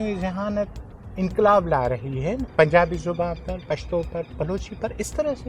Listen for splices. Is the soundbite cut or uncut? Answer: cut